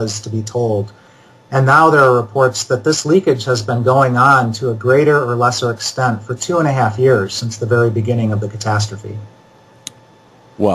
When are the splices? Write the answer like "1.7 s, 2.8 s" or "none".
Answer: 8.9 s